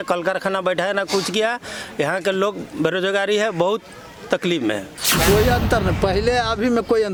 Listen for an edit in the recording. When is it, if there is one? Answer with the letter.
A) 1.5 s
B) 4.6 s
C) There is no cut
C